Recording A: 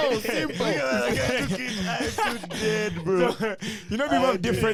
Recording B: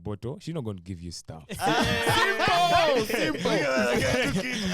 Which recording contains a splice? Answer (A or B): B